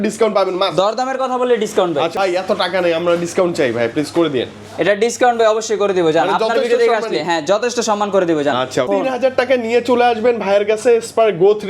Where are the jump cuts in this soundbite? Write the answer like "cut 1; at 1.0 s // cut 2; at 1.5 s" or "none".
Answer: cut 1; at 2.1 s // cut 2; at 8.9 s